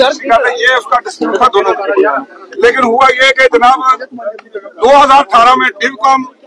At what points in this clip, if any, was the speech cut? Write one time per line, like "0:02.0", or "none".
0:01.4